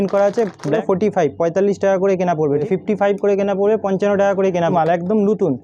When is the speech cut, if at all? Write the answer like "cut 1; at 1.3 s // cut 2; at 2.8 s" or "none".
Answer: cut 1; at 0.8 s // cut 2; at 2.6 s // cut 3; at 4.7 s

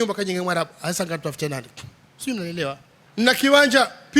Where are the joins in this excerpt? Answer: cut 1; at 2.9 s

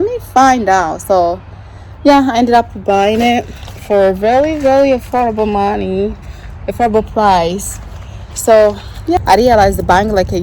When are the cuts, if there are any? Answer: cut 1; at 9.2 s

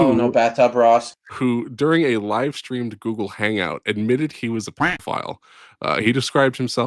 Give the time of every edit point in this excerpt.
cut 1; at 1.2 s

